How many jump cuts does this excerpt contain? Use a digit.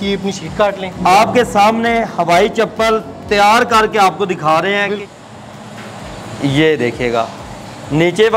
2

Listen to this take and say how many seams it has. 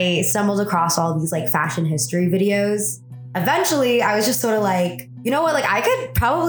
1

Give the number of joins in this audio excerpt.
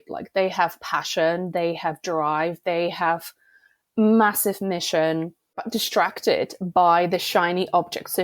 1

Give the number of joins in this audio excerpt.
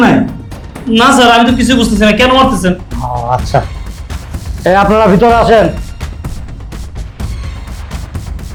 0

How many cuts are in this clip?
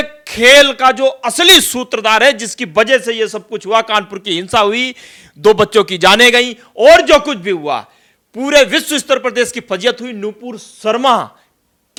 0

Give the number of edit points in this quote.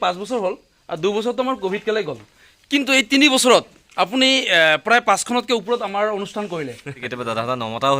1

